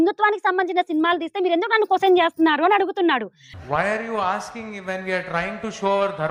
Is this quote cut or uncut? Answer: uncut